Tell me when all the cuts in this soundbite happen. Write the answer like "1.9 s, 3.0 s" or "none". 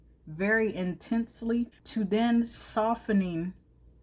1.8 s